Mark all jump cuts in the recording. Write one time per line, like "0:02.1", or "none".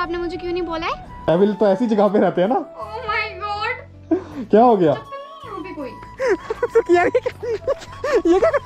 0:01.2
0:06.0